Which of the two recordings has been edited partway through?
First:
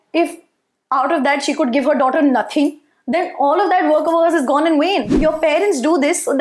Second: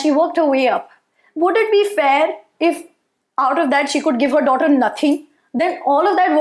first; 1 cut; at 5.1 s

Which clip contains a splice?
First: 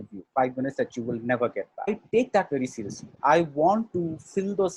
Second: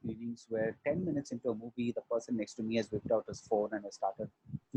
first; 1 cut; at 1.9 s

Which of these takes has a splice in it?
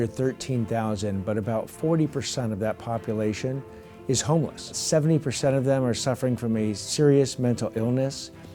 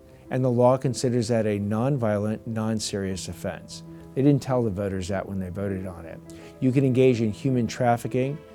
first; 3 cuts; at 1.7 s, 4.8 s, 6.8 s

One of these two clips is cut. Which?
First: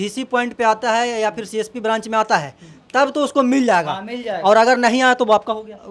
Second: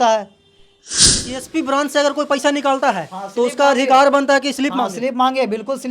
second; 1 cut; at 1.1 s

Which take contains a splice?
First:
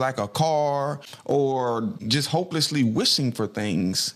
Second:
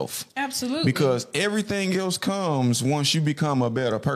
first; 2 cuts; at 1.1 s, 2.1 s

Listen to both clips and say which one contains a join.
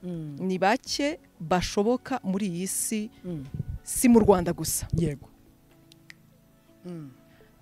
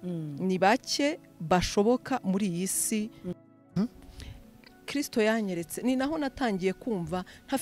second; 1 cut; at 3.7 s

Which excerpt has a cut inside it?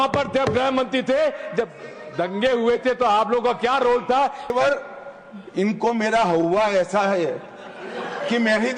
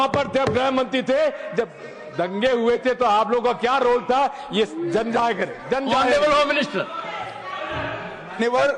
first; 1 cut; at 4.5 s

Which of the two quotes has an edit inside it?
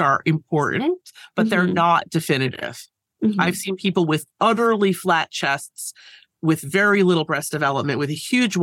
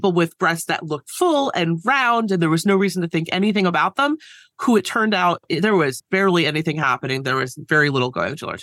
second; 1 cut; at 6.0 s

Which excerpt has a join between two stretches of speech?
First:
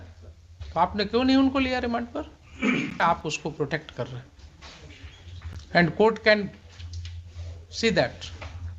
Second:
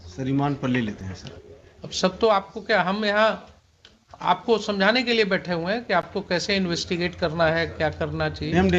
first; 1 cut; at 3.0 s

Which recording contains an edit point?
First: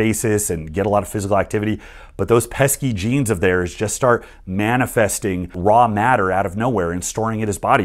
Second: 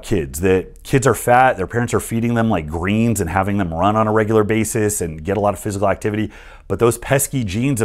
first; 1 cut; at 5.5 s

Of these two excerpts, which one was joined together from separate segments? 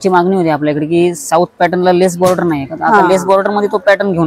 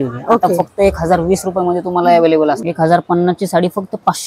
second; 1 cut; at 2.6 s

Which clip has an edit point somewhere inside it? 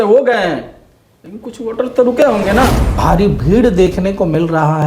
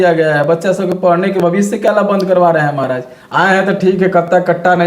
first; 1 cut; at 2.9 s

